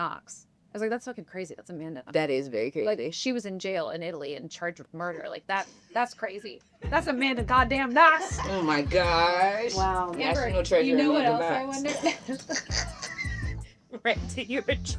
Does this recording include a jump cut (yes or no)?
yes